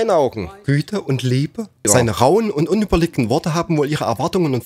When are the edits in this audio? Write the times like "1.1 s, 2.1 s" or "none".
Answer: 1.8 s